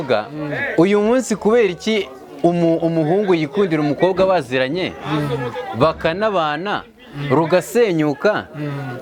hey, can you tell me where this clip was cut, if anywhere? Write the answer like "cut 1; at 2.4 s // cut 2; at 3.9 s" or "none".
none